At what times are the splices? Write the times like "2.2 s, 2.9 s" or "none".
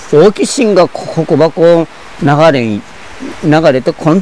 none